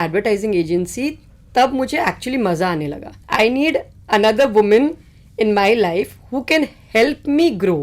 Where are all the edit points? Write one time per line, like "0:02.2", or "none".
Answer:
0:03.2

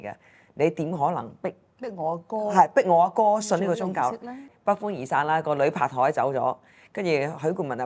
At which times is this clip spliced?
0:04.5

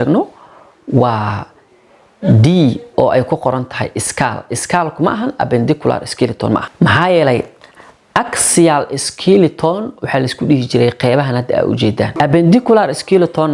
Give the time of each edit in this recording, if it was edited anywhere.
0:06.7
0:12.1

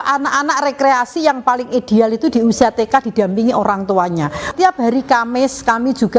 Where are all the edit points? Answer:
0:04.5

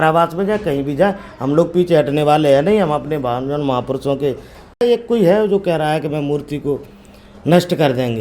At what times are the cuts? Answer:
0:04.8

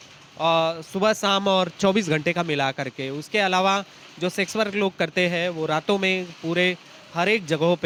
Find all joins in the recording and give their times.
none

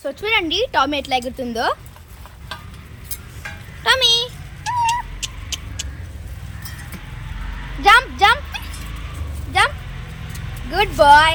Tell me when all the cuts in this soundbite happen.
none

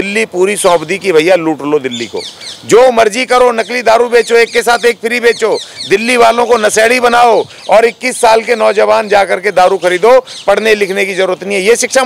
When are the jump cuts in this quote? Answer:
none

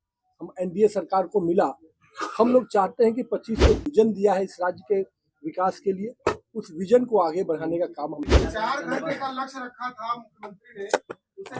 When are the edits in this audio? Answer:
0:03.8
0:08.2

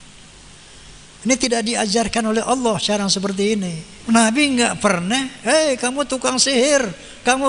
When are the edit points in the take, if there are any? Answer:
0:03.9

